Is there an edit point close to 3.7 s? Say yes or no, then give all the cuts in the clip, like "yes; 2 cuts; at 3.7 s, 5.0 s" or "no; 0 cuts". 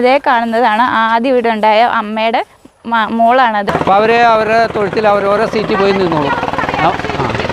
yes; 1 cut; at 3.7 s